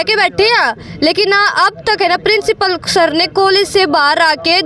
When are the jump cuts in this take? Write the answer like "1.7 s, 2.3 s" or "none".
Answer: none

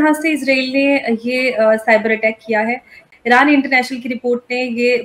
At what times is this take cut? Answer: 3.0 s

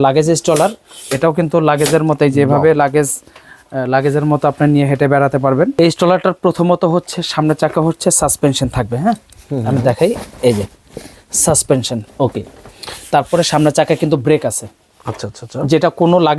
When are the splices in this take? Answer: 5.7 s

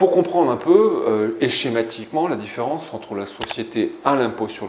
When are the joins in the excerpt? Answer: none

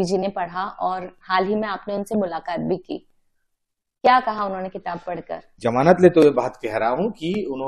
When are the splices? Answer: 5.5 s

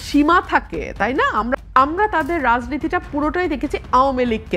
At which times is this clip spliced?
1.6 s

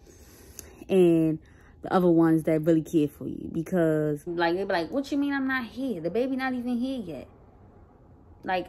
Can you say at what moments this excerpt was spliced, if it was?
4.3 s

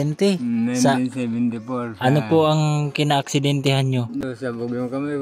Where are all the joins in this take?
4.2 s

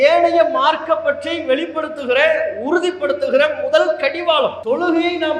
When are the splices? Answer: none

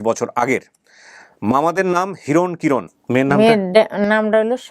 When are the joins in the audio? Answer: 2.9 s

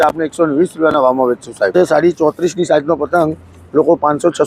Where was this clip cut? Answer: 1.7 s

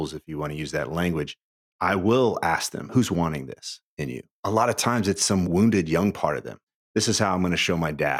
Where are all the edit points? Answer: 1.7 s, 2.9 s, 4.4 s, 5.4 s, 6.7 s

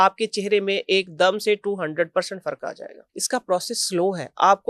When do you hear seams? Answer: 3.0 s

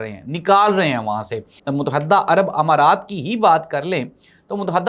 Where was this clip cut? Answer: 1.6 s

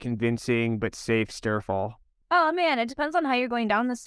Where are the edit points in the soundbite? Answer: 2.1 s

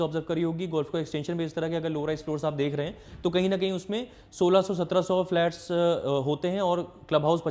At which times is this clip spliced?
none

